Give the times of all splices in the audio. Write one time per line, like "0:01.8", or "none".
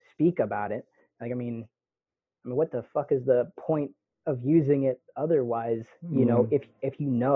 none